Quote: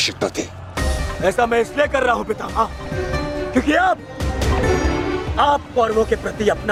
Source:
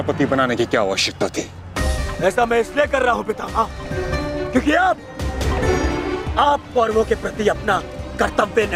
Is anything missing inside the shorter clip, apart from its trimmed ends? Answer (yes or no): no